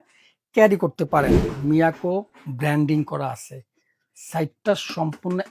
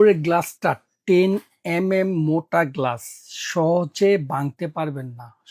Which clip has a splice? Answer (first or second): first